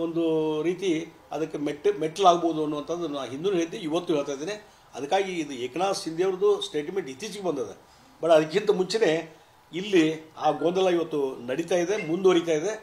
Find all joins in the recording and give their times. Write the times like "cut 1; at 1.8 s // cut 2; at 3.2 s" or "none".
cut 1; at 4.5 s